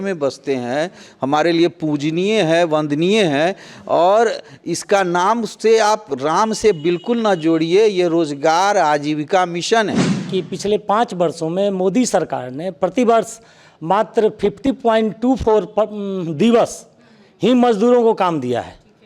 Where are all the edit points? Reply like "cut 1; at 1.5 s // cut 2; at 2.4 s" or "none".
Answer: cut 1; at 10.3 s